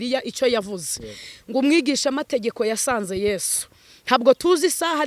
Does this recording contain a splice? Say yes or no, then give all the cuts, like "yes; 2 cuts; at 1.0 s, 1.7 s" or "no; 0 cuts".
no; 0 cuts